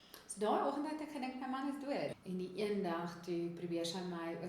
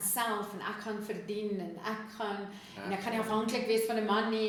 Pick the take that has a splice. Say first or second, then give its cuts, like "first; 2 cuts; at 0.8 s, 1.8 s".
first; 1 cut; at 2.1 s